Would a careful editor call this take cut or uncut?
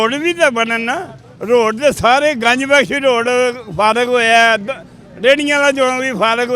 uncut